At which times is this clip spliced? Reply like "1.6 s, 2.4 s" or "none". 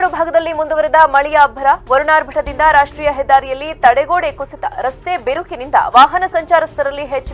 none